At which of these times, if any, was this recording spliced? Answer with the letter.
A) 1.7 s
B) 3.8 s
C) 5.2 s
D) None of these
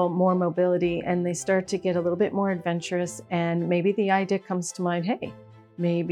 D